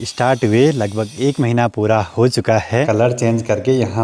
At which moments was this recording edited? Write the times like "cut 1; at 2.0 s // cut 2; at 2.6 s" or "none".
cut 1; at 2.9 s